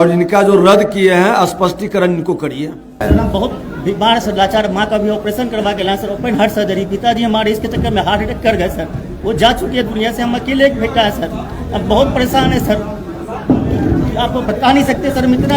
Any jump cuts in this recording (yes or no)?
yes